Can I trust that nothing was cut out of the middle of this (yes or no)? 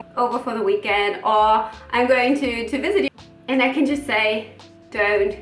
no